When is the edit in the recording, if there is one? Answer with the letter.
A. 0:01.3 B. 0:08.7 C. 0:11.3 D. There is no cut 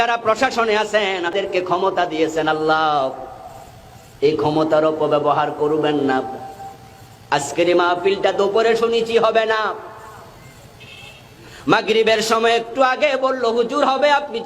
A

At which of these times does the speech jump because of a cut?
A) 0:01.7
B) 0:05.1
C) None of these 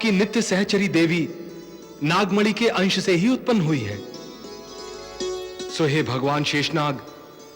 B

